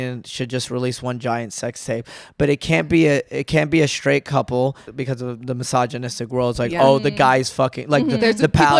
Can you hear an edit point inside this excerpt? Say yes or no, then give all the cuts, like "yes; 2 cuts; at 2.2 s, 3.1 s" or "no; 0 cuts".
yes; 1 cut; at 4.9 s